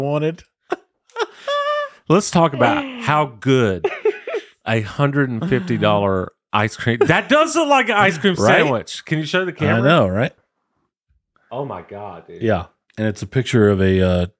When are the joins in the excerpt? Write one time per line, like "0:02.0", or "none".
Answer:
0:10.5
0:12.8